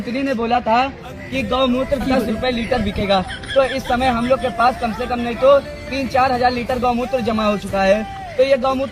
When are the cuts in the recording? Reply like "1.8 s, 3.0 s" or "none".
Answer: none